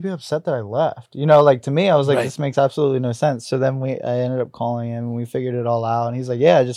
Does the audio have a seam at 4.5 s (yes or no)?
no